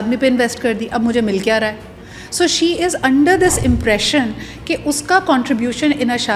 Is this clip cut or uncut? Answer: uncut